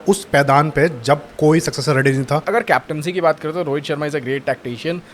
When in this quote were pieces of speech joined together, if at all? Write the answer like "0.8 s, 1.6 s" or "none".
2.5 s